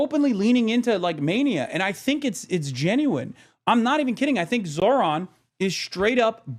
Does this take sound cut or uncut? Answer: uncut